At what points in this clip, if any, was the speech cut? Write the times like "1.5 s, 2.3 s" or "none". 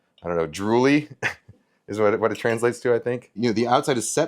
3.4 s